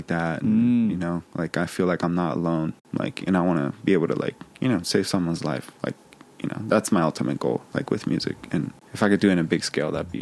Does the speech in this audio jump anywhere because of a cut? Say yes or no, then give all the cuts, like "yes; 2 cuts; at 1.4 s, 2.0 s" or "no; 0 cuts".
yes; 2 cuts; at 2.8 s, 8.8 s